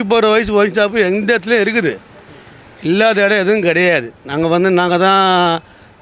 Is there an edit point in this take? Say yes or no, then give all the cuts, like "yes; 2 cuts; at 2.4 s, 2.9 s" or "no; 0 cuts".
no; 0 cuts